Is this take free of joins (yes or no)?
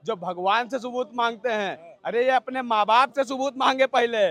yes